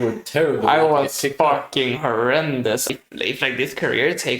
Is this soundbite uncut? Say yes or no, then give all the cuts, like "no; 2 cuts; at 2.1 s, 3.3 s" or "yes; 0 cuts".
no; 1 cut; at 2.9 s